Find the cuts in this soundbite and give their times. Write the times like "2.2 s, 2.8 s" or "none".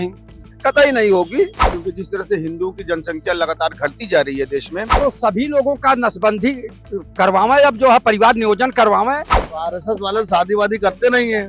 1.6 s, 4.8 s, 9.3 s